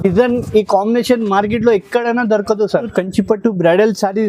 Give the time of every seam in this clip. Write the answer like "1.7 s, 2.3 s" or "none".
2.9 s